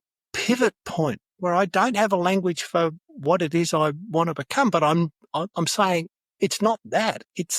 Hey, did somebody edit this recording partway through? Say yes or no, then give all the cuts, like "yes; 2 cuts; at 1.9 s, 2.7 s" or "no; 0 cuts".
yes; 2 cuts; at 1.3 s, 3.1 s